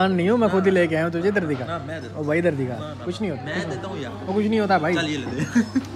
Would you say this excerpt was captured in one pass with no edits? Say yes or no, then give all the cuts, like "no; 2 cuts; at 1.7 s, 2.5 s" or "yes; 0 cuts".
yes; 0 cuts